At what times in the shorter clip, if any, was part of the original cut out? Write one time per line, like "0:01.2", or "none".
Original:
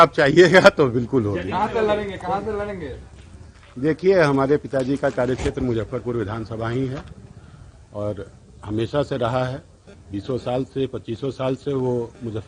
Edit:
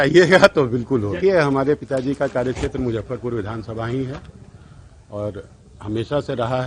0:01.2

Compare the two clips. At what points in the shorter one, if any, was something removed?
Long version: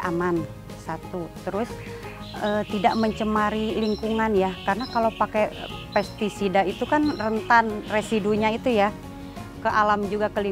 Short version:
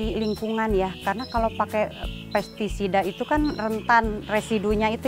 none

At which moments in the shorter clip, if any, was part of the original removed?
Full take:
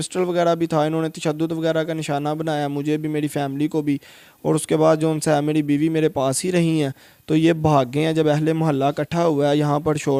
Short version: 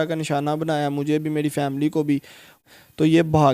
0:02.6

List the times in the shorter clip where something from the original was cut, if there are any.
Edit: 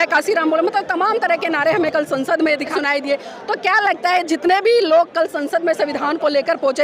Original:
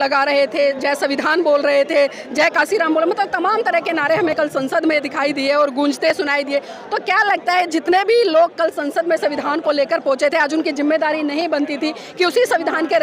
0:02.7

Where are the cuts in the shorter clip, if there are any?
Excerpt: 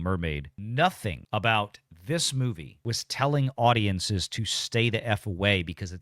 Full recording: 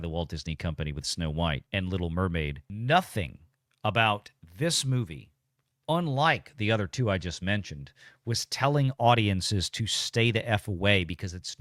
0:01.1
0:02.7

